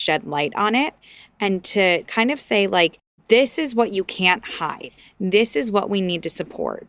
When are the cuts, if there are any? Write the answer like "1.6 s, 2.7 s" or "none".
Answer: none